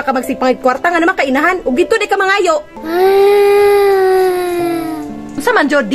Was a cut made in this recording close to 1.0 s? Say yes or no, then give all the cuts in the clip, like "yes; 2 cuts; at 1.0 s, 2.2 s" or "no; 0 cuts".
no; 1 cut; at 2.8 s